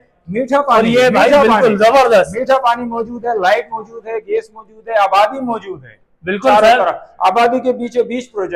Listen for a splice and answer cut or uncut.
uncut